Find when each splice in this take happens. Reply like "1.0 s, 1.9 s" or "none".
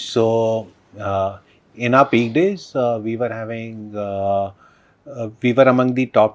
none